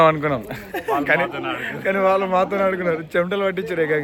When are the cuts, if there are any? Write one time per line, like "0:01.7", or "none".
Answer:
none